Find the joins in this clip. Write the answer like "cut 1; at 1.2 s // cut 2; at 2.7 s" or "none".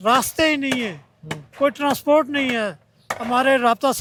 none